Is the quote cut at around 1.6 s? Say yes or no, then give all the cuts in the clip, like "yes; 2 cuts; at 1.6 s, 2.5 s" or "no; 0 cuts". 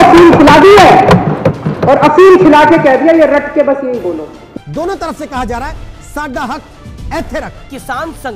no; 1 cut; at 4.4 s